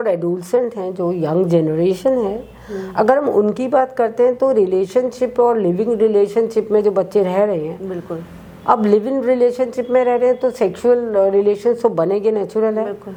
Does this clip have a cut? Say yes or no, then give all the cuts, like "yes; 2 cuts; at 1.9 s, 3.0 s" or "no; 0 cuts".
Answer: no; 0 cuts